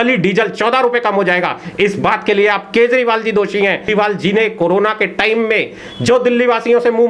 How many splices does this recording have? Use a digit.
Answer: 1